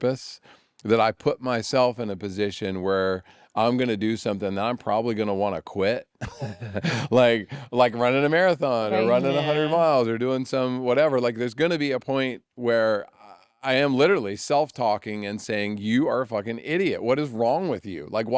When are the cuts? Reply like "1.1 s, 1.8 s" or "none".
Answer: none

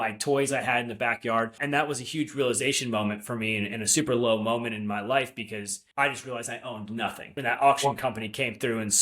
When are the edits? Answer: 1.6 s, 5.8 s, 7.3 s

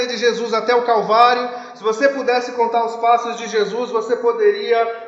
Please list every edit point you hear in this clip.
none

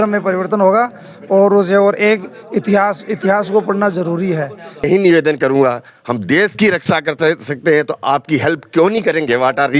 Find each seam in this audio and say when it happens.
4.8 s

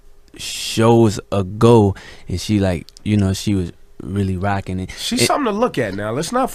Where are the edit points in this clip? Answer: 5.3 s

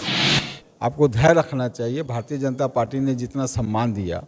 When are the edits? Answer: none

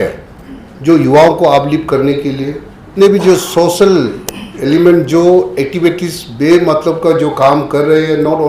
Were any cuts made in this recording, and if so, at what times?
2.9 s

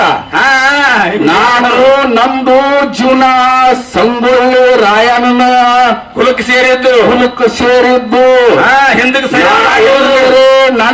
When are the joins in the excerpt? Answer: none

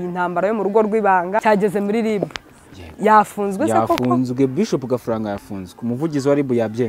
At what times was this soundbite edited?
1.4 s

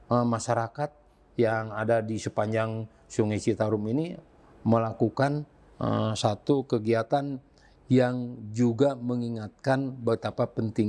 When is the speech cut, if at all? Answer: none

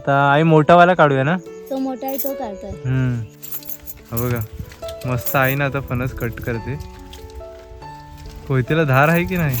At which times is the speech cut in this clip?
3.5 s

